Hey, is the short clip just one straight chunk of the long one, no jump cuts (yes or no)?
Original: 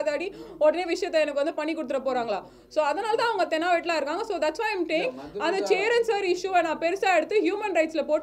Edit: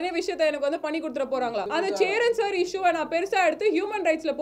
no